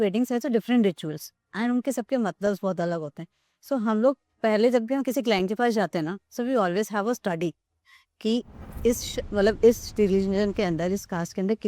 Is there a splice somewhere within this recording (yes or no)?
no